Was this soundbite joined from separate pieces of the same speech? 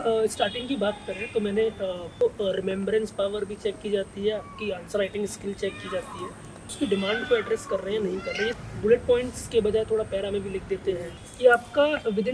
yes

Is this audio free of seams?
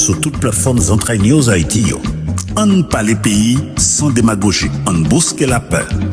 yes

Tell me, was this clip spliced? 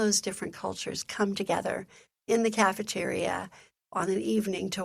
no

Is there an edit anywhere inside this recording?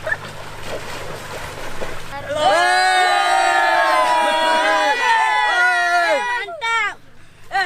yes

